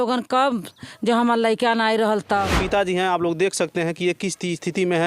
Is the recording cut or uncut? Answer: cut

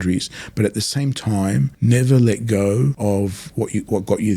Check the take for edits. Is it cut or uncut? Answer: cut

